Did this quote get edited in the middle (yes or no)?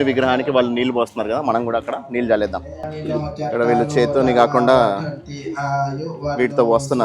yes